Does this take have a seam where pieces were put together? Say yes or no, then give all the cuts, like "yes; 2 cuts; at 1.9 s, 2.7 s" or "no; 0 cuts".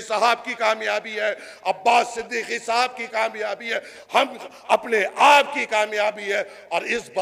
no; 0 cuts